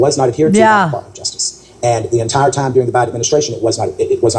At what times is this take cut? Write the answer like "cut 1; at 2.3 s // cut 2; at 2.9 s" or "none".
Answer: none

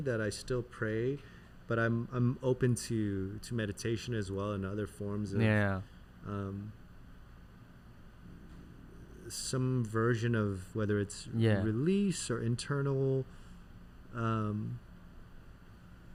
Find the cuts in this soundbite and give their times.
none

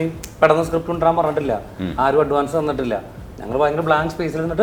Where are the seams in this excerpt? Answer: none

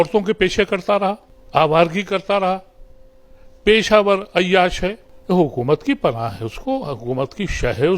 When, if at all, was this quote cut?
cut 1; at 1.3 s // cut 2; at 5.1 s

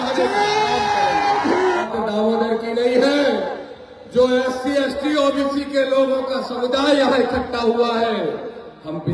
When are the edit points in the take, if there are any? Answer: cut 1; at 1.9 s

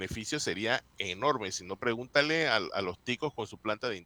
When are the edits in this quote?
none

